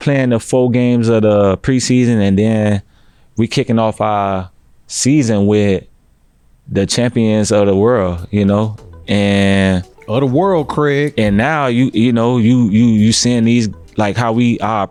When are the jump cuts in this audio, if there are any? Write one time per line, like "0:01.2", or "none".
none